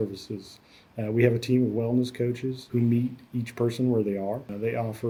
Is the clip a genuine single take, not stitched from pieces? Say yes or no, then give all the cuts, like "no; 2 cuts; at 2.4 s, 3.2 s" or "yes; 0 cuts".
yes; 0 cuts